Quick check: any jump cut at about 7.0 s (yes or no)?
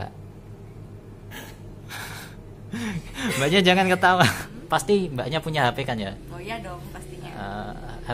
no